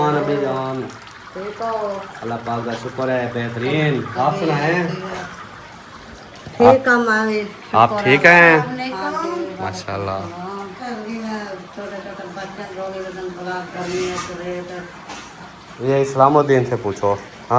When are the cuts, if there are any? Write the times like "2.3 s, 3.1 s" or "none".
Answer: 10.9 s